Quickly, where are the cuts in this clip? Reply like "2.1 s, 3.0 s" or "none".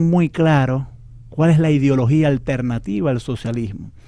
1.6 s

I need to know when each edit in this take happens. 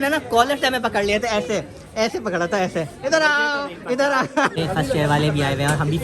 4.5 s

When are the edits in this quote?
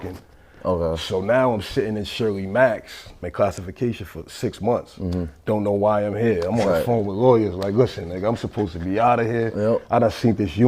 3.2 s

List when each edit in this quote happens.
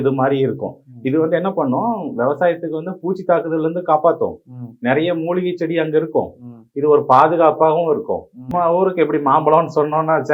8.5 s

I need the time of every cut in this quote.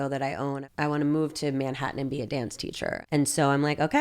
3.0 s

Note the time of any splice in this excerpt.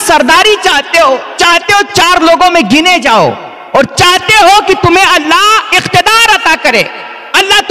none

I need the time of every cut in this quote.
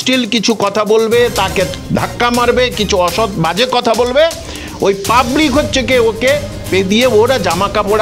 1.8 s

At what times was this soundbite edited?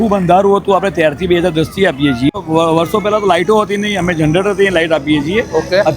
2.3 s

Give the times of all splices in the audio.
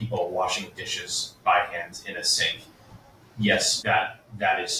none

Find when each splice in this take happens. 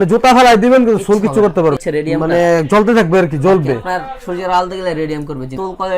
1.8 s

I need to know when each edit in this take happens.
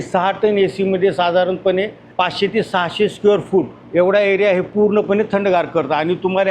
2.0 s, 3.8 s

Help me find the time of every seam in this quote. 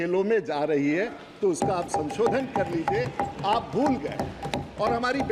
none

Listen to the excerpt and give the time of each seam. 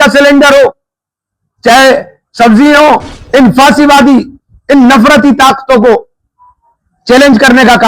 3.1 s

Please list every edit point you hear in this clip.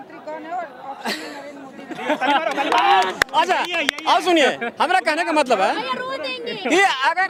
none

